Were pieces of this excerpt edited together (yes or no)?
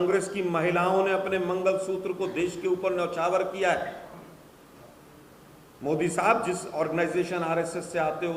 no